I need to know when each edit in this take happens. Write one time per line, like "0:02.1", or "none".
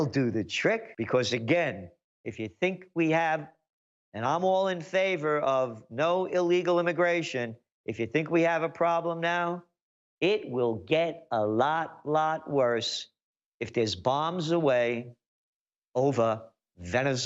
0:00.9